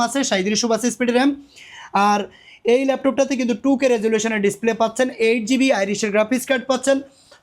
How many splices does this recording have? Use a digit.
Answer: 0